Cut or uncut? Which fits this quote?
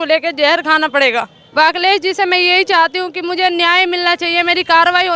cut